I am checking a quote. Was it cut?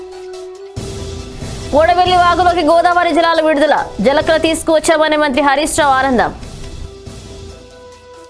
no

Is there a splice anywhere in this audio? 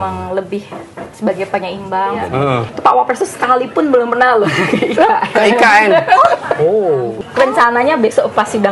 yes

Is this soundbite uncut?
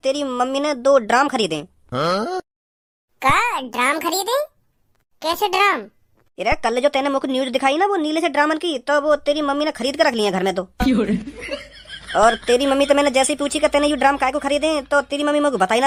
yes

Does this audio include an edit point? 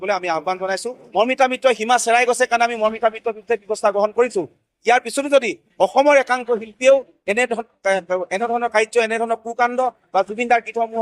yes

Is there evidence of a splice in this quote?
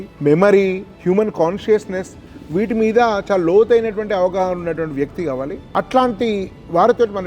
no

